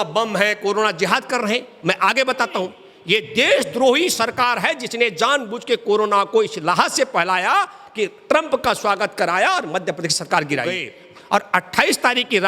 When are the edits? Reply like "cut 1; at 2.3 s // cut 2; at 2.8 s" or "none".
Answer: cut 1; at 2.9 s // cut 2; at 10.9 s